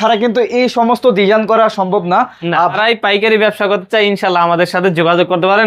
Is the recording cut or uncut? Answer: cut